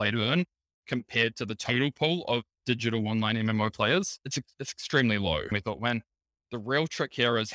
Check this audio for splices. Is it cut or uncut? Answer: cut